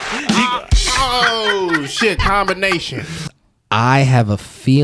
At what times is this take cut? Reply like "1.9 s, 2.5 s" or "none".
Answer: 3.3 s

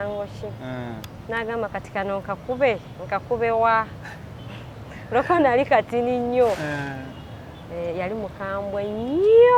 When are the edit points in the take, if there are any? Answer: none

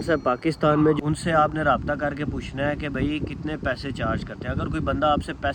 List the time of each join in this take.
1.0 s

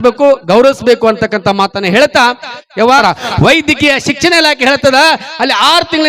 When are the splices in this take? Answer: 3.0 s

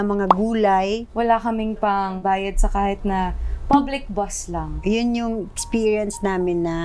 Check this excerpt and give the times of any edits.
1.1 s, 2.2 s, 4.8 s

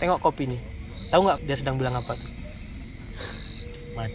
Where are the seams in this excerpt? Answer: 1.4 s, 2.8 s

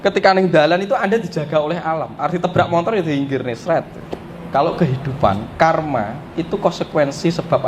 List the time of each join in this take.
4.5 s

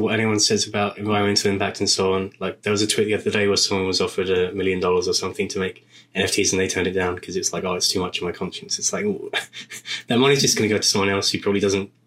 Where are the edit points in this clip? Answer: 1.0 s

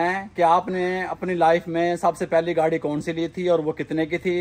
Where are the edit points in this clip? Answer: none

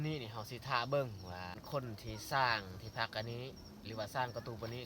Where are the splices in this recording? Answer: 1.6 s

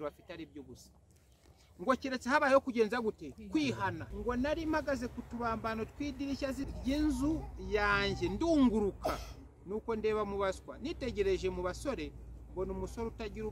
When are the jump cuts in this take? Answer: 4.1 s, 6.6 s

